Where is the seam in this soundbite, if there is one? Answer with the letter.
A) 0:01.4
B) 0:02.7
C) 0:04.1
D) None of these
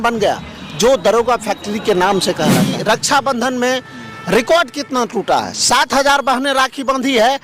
B